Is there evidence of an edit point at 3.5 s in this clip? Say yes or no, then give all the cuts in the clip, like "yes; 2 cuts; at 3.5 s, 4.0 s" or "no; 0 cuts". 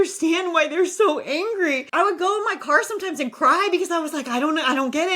no; 1 cut; at 1.8 s